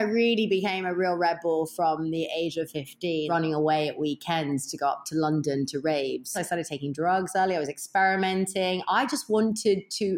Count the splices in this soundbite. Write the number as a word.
two